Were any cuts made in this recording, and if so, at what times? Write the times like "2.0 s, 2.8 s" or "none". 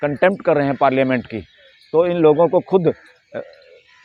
none